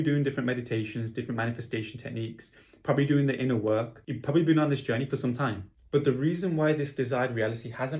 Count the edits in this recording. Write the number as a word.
zero